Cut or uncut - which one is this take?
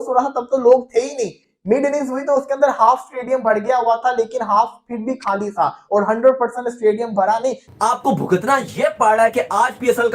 cut